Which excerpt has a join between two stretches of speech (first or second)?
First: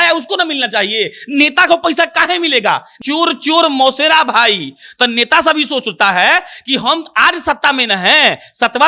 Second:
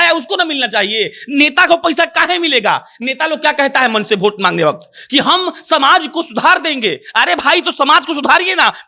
first